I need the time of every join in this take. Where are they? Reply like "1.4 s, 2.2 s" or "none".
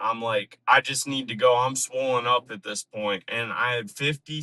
3.4 s